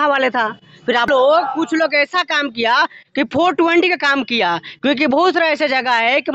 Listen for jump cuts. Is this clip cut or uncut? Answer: cut